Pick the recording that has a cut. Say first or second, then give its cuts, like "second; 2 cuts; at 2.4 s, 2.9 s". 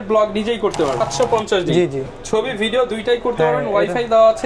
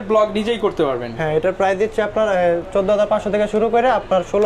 first; 1 cut; at 1.1 s